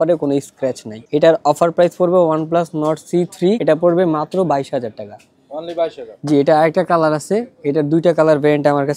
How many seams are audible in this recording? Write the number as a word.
zero